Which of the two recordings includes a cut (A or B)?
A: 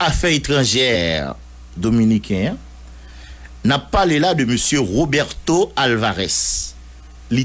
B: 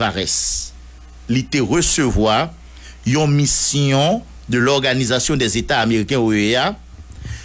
A